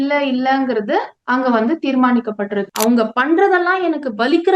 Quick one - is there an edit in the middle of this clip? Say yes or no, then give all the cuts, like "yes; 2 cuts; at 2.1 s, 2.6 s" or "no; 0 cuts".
yes; 1 cut; at 2.7 s